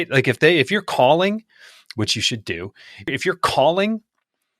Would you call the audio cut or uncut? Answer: cut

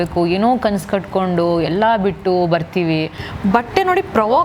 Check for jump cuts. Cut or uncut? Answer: cut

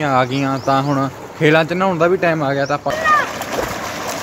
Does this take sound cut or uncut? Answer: cut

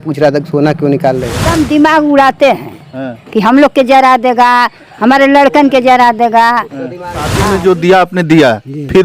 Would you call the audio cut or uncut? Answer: cut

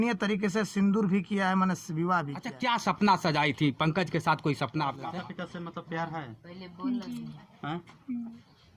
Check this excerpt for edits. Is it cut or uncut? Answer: cut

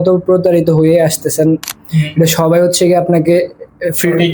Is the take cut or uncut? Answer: cut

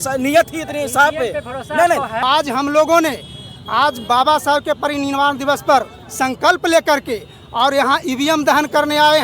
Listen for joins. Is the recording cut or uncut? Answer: cut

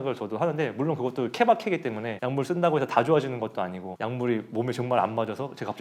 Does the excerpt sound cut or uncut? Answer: uncut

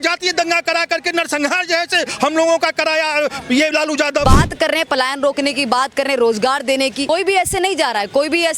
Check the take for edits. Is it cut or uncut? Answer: cut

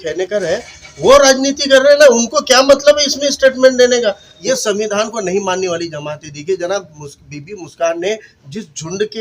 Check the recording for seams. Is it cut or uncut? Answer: cut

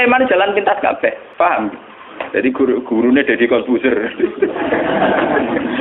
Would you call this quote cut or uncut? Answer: cut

